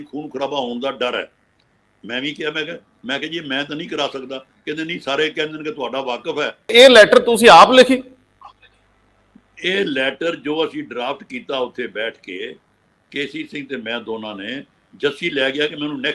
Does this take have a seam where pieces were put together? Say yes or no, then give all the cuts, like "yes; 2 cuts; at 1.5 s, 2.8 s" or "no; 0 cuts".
yes; 1 cut; at 6.7 s